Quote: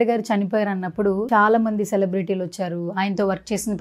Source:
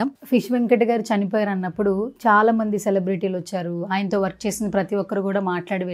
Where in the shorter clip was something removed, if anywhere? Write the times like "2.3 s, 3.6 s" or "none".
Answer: 1.2 s